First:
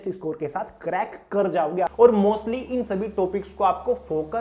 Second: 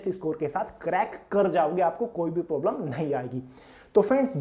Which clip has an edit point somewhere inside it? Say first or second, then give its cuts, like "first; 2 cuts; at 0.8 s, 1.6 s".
first; 1 cut; at 1.9 s